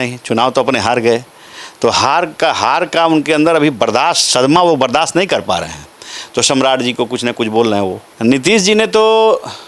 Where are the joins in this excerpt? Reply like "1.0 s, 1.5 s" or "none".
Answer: 8.1 s

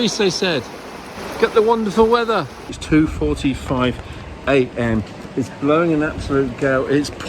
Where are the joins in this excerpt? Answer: 2.7 s

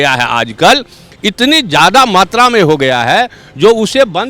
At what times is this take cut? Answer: none

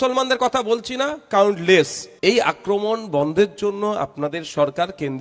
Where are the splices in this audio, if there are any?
2.0 s

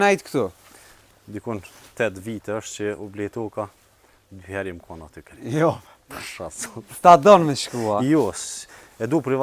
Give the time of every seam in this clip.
none

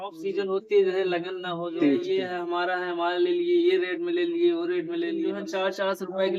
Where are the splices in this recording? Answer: 2.1 s, 5.4 s

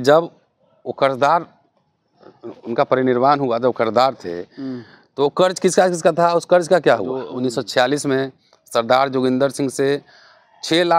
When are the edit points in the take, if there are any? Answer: 7.3 s

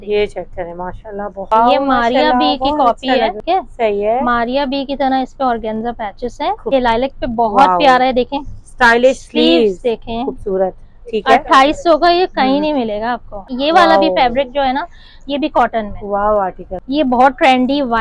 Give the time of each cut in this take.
1.5 s, 3.4 s, 6.7 s, 13.5 s, 16.7 s

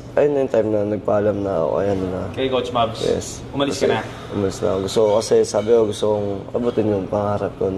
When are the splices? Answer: none

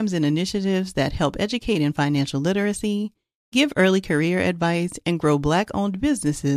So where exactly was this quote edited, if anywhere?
none

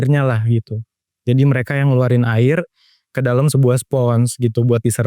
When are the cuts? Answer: none

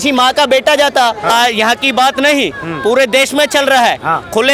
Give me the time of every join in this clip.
1.3 s

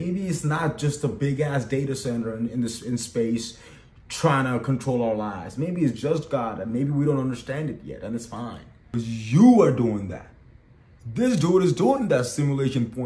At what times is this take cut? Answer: 8.7 s

